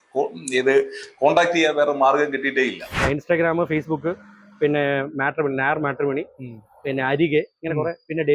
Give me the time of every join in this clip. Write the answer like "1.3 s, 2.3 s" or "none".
3.0 s